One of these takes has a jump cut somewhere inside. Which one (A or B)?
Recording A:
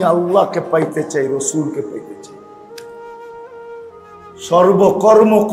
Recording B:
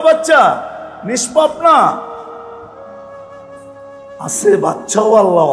A